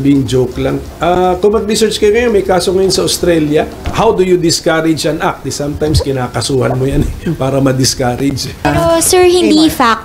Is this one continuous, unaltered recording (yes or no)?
no